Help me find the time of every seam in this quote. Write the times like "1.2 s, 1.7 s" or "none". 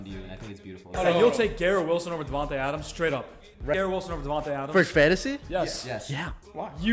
1.0 s, 3.7 s

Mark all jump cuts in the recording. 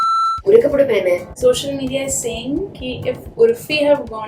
1.3 s

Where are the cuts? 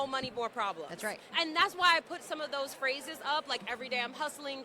none

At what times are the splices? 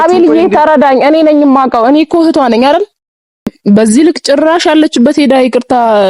3.6 s

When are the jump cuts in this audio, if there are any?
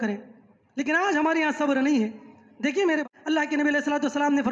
3.0 s

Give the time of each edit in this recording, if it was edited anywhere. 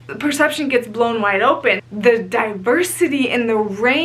1.8 s

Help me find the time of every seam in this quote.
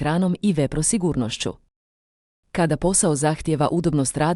none

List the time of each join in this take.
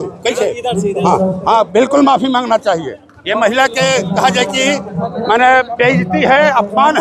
none

